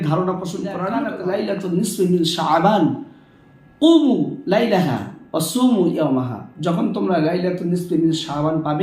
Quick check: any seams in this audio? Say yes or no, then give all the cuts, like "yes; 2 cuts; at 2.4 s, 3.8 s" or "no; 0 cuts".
yes; 1 cut; at 0.9 s